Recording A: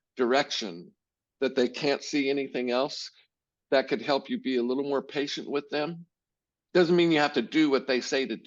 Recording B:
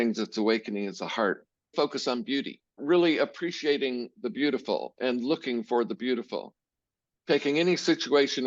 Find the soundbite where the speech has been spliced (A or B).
B